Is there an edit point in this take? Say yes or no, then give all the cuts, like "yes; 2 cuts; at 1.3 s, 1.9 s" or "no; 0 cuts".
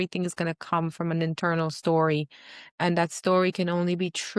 no; 0 cuts